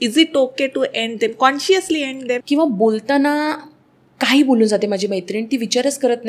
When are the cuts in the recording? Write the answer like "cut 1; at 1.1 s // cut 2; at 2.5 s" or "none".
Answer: cut 1; at 2.4 s